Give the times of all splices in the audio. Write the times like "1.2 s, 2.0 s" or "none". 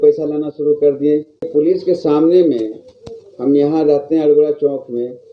1.5 s